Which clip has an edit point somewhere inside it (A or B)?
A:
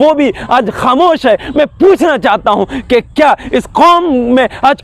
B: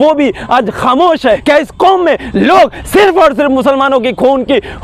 B